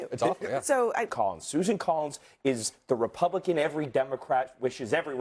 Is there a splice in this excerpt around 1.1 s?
yes; 1 cut; at 1.1 s

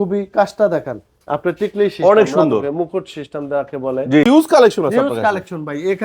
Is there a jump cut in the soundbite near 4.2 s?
yes; 1 cut; at 4.2 s

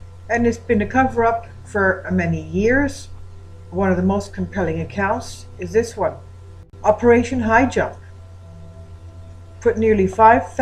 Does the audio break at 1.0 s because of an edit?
no; 1 cut; at 2.7 s

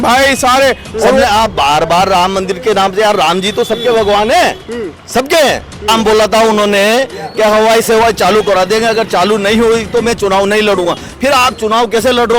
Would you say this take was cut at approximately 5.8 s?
yes; 2 cuts; at 1.2 s, 5.8 s

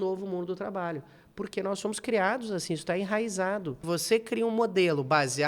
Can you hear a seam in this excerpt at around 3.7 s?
yes; 1 cut; at 3.7 s

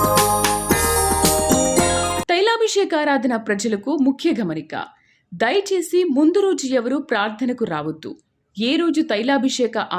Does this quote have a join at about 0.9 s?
no; 1 cut; at 2.1 s

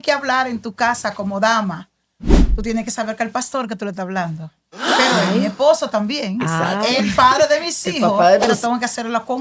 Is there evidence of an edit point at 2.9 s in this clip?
no; 1 cut; at 8.5 s

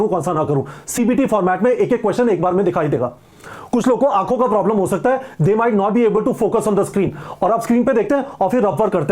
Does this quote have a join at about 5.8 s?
no; 0 cuts

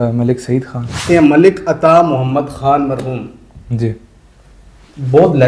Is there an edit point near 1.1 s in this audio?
yes; 1 cut; at 1.1 s

